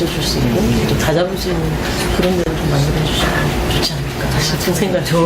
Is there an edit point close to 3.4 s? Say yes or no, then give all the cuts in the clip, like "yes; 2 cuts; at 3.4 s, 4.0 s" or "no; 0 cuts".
yes; 1 cut; at 3.4 s